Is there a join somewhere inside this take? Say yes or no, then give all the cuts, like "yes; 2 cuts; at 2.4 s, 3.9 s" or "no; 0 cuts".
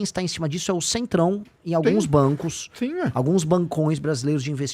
no; 0 cuts